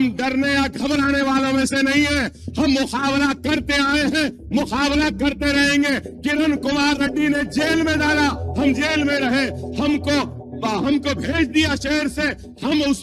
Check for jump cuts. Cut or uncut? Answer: uncut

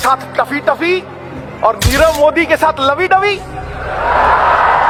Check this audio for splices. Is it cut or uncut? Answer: uncut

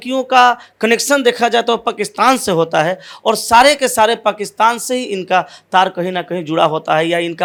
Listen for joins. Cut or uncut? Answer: uncut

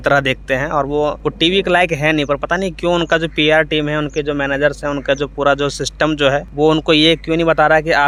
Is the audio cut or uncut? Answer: uncut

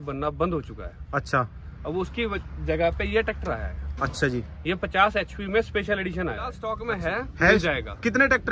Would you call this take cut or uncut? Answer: cut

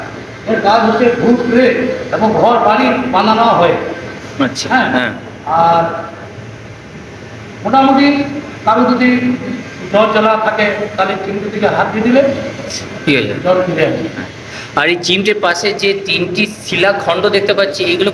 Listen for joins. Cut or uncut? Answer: uncut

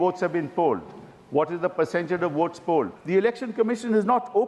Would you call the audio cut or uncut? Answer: cut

